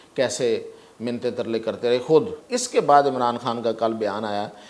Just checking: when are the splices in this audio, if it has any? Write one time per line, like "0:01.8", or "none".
0:02.4